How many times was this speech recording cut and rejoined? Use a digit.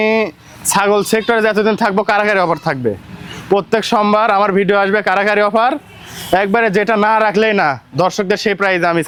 0